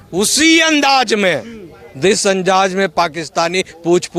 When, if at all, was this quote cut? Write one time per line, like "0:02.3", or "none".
none

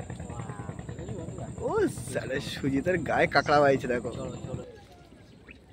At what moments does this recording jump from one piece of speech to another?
0:04.6

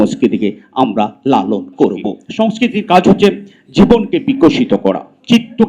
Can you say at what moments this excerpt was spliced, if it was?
0:02.1

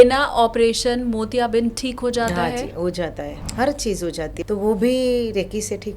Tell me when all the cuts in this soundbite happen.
0:03.4
0:04.4

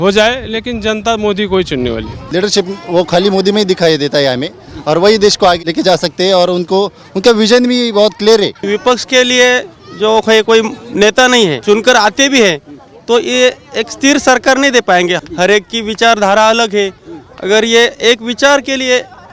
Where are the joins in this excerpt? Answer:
0:02.2
0:05.6
0:08.6
0:11.6
0:15.2

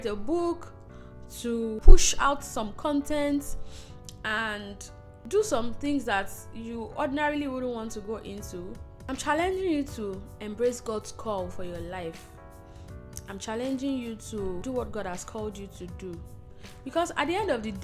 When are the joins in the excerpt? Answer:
0:01.8
0:05.3
0:08.9
0:14.6

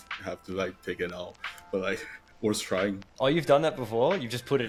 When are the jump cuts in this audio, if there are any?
none

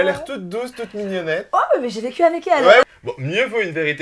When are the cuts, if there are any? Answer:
0:02.8

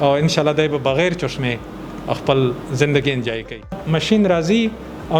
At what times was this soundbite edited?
0:03.8

